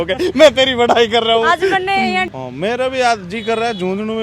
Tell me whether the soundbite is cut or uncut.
cut